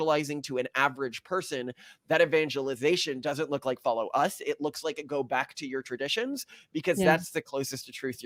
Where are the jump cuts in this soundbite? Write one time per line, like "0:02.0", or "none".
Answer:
none